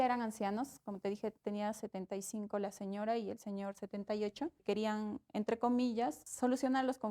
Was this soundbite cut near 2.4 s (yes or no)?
no